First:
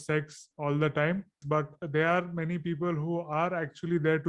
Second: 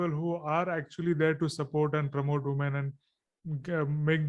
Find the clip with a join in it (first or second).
first